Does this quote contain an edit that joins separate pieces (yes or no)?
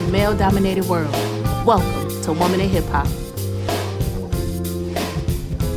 no